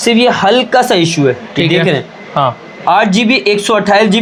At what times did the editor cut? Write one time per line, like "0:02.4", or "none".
none